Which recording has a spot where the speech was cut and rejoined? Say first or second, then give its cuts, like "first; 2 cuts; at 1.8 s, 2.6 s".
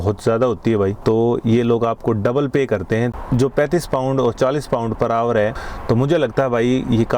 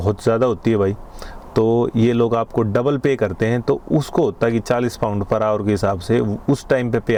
first; 3 cuts; at 1.0 s, 3.1 s, 5.5 s